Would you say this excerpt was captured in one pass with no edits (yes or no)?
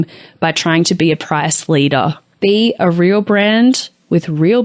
no